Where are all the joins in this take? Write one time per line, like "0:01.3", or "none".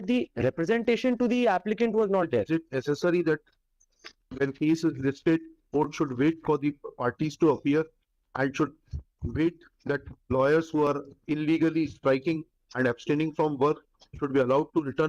none